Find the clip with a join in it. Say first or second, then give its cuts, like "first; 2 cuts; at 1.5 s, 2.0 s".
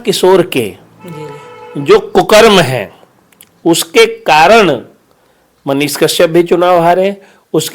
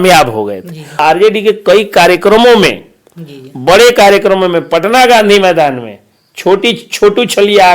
second; 1 cut; at 1.0 s